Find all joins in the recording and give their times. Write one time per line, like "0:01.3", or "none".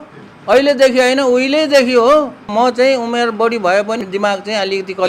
0:02.4
0:04.0

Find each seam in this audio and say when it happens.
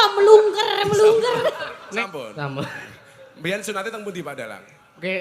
0:02.0

